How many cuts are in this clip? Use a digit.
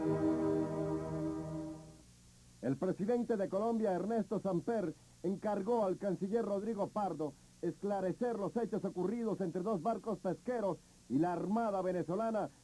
1